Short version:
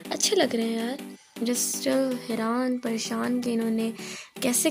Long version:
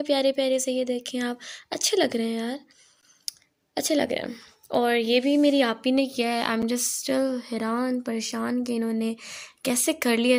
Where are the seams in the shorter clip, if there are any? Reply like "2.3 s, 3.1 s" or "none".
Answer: 1.4 s